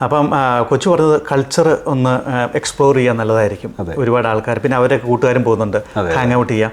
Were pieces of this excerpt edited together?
no; 0 cuts

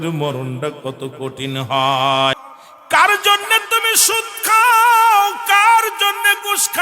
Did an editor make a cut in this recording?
yes; 1 cut; at 2.3 s

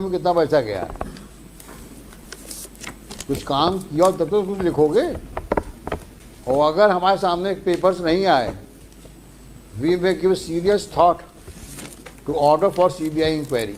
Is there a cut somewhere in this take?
no; 0 cuts

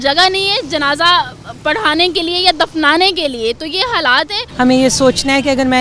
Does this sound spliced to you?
yes; 1 cut; at 4.4 s

